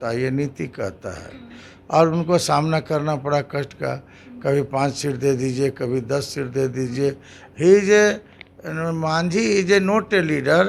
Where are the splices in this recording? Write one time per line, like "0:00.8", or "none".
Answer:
none